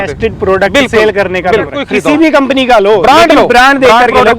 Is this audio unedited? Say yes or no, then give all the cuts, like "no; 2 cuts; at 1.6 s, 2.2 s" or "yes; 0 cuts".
no; 1 cut; at 1.8 s